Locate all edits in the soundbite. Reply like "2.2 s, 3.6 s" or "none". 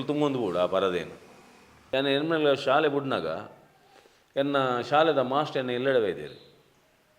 1.7 s